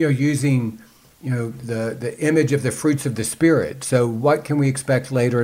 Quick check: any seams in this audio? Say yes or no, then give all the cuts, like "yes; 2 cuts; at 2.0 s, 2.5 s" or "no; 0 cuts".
no; 0 cuts